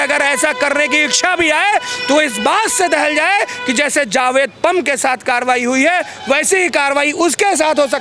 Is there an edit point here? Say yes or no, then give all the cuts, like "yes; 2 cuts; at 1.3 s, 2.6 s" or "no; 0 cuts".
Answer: no; 0 cuts